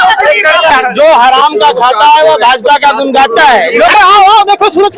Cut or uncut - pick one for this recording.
cut